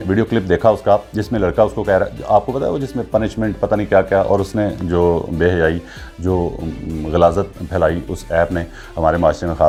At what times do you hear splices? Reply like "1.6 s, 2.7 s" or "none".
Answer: none